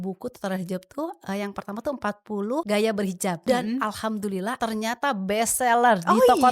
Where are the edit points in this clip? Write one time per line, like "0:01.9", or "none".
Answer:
0:02.6
0:03.4
0:04.5